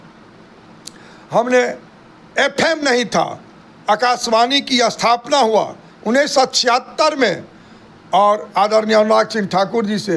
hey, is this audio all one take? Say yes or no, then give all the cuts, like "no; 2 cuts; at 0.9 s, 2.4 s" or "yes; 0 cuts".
yes; 0 cuts